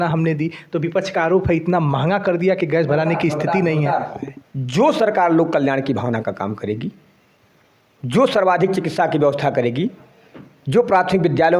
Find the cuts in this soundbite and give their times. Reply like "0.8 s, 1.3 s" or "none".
4.2 s